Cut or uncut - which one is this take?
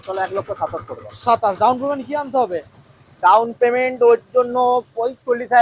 uncut